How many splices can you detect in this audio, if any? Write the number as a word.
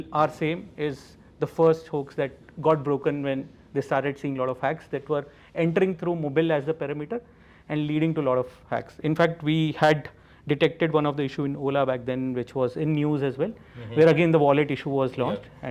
zero